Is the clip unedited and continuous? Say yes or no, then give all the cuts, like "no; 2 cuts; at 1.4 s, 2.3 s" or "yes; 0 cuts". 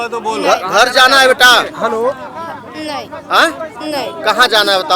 yes; 0 cuts